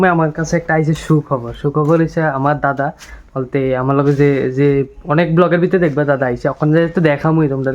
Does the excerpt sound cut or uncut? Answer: uncut